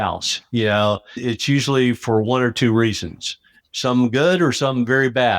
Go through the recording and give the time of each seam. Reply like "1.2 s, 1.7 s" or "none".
1.2 s, 3.6 s